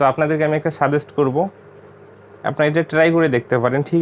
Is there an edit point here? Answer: no; 0 cuts

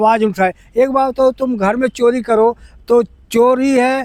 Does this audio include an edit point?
no; 0 cuts

